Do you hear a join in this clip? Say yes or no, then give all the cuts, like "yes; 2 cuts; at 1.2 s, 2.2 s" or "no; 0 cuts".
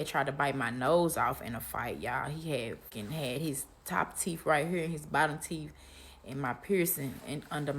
yes; 1 cut; at 2.9 s